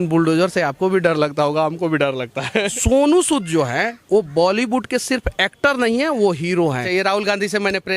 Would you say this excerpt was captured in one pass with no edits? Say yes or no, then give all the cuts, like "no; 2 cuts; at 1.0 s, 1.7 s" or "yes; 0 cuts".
no; 2 cuts; at 2.7 s, 6.8 s